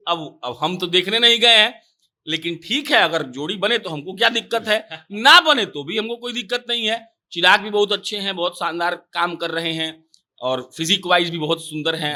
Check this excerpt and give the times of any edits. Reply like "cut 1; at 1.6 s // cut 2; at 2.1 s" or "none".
none